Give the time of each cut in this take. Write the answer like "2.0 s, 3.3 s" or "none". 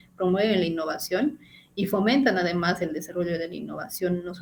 none